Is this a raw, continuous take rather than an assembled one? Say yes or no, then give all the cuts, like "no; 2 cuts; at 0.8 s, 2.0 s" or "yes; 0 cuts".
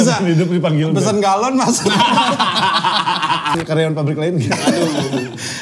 no; 1 cut; at 3.5 s